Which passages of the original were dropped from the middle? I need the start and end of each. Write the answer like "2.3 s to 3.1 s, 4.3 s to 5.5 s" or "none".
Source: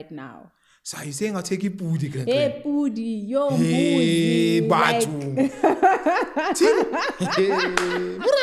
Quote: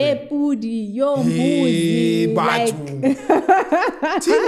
none